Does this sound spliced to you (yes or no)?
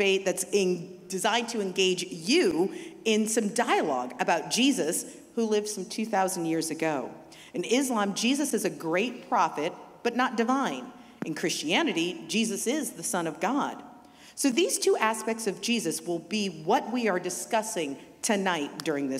no